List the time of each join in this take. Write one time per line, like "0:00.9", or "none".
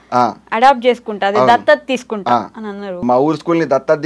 0:03.0